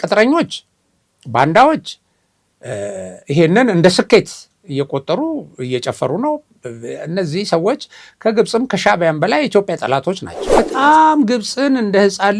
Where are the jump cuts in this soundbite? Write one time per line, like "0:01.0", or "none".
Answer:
0:10.4